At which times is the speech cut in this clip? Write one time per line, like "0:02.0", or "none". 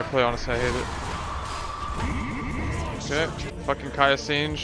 0:03.5

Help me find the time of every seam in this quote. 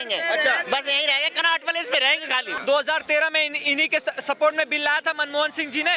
0:02.5

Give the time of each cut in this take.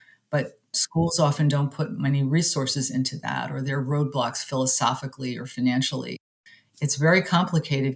0:06.2

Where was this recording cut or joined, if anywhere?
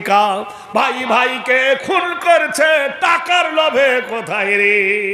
none

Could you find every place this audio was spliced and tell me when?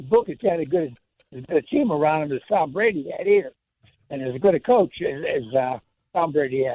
none

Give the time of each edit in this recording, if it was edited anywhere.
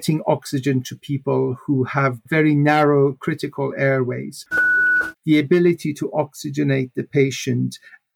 0:04.8

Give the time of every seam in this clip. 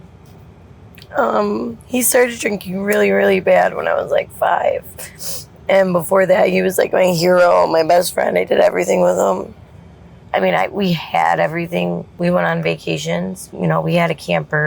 0:10.1
0:12.1
0:13.4

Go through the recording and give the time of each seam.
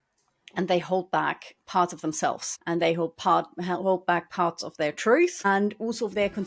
0:02.5
0:05.4

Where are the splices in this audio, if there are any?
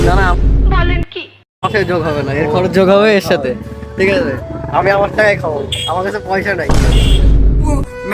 none

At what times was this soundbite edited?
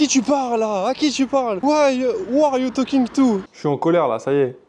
0:03.4

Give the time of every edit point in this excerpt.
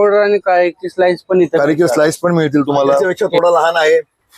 0:03.0

